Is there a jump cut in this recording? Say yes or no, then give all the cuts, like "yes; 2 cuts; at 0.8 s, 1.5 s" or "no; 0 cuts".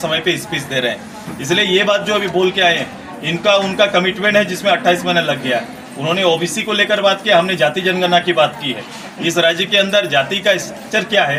no; 0 cuts